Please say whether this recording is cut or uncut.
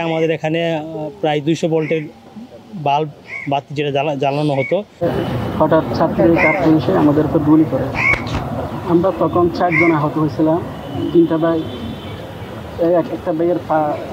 cut